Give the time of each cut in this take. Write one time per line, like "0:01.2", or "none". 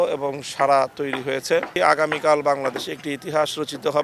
0:01.7